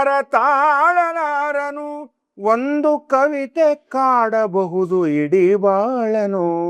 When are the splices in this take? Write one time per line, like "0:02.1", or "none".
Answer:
none